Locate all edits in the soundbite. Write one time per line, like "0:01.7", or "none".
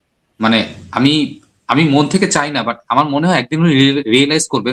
none